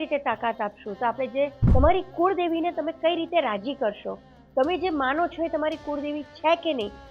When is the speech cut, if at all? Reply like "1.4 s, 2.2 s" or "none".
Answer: 1.6 s